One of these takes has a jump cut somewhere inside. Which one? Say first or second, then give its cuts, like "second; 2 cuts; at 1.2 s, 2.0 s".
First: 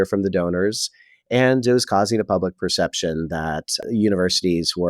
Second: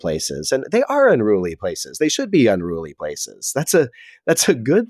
first; 1 cut; at 3.9 s